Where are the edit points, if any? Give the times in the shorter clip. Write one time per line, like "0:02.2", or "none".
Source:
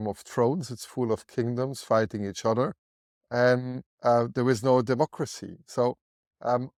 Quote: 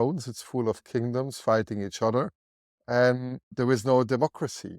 0:03.5